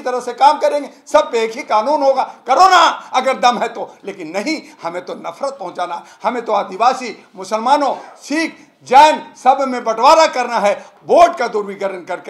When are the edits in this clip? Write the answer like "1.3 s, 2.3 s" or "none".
10.9 s